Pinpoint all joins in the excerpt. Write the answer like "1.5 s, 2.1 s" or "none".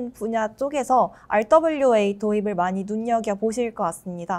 none